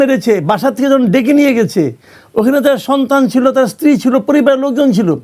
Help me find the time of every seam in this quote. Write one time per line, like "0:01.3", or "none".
none

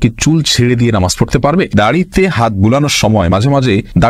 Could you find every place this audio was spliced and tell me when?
0:01.7

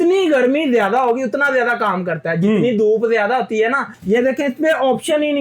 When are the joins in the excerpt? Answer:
0:03.9

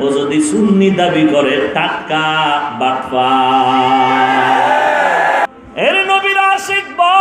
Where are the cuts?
0:05.5

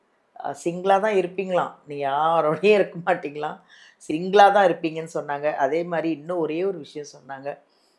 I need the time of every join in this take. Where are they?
0:04.1

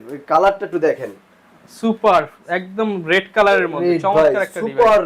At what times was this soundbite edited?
none

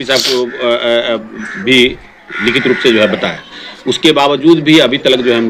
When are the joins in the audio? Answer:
none

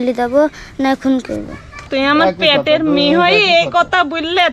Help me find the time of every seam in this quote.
0:01.9

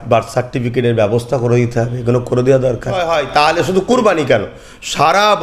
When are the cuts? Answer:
0:03.1

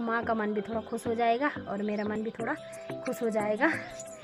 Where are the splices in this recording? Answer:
none

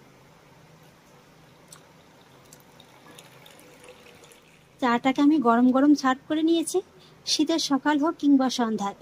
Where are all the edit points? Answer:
0:04.6

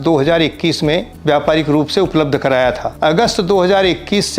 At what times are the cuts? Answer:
0:01.1
0:02.9

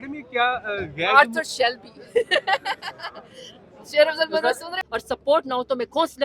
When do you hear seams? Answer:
0:04.7

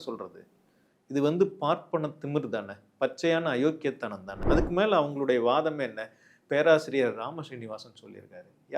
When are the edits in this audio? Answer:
0:04.4

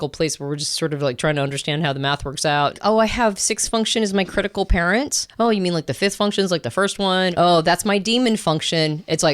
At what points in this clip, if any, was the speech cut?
0:02.8
0:05.2
0:07.3

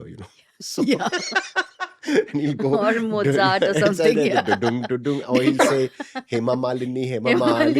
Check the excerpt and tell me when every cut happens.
none

